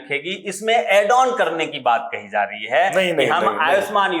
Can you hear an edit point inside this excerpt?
no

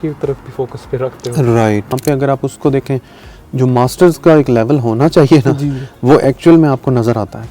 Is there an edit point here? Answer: yes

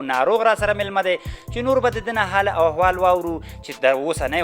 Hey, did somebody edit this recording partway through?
no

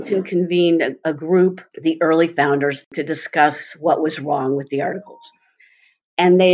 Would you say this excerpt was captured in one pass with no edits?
no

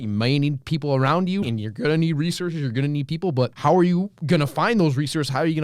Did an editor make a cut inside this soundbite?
yes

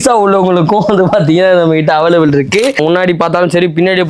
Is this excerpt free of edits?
no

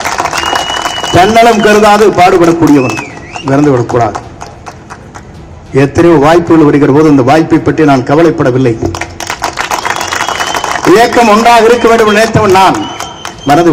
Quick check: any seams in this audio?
no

